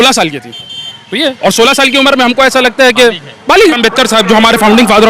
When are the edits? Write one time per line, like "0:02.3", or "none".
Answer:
0:03.8